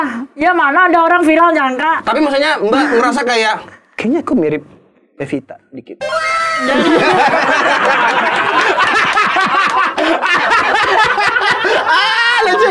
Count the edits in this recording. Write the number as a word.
zero